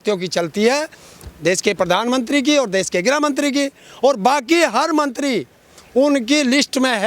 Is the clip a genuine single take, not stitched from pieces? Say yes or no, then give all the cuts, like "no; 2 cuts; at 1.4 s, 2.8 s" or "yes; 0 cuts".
yes; 0 cuts